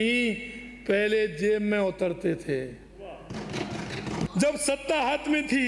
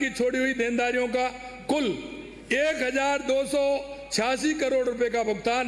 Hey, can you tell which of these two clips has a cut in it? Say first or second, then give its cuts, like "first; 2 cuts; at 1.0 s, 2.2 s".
first; 1 cut; at 4.3 s